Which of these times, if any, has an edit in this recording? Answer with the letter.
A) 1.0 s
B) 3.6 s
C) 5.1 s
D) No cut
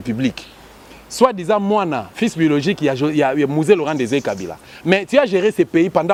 D